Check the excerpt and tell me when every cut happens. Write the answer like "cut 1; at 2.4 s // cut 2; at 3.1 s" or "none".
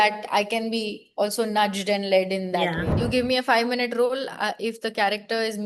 cut 1; at 2.9 s